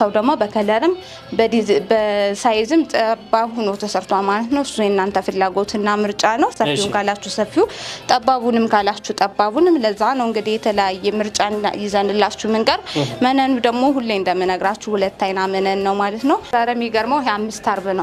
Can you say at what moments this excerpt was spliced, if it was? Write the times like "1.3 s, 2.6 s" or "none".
none